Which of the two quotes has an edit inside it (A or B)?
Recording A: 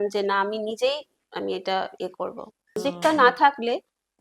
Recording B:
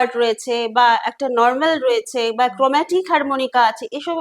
A